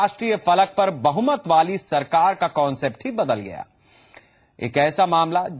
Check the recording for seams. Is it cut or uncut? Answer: uncut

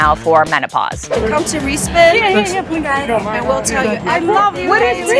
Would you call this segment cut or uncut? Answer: cut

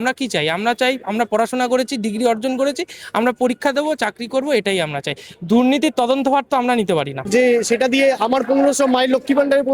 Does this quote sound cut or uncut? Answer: cut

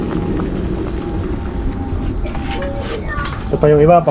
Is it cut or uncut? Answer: uncut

